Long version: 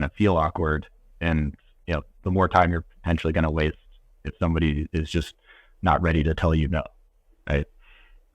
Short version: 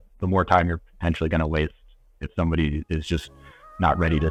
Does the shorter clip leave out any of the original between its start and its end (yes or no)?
no